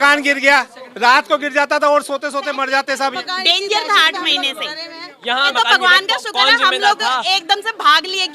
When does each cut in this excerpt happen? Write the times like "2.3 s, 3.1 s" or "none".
3.2 s, 5.5 s